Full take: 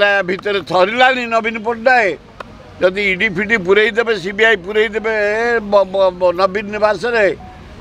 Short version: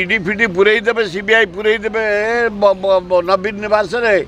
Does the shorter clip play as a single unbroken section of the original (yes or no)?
yes